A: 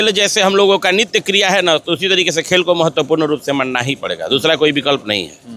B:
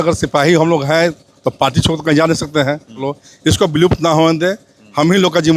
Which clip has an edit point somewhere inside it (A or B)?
B